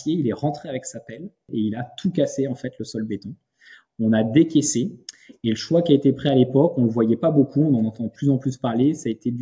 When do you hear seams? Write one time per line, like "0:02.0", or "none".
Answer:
0:01.5